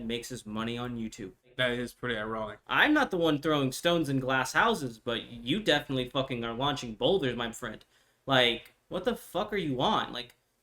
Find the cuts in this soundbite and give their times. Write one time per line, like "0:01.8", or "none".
0:01.5
0:02.6